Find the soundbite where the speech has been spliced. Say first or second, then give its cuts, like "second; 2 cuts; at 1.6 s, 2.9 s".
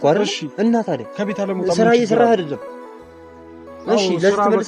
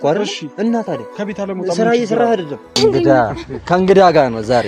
second; 1 cut; at 2.8 s